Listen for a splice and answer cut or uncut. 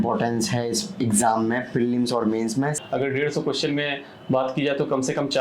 cut